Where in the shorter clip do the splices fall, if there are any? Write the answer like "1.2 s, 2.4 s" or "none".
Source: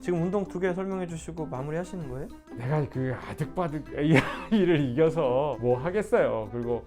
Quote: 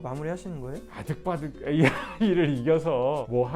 0.9 s